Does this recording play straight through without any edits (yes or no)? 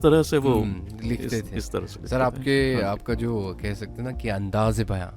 yes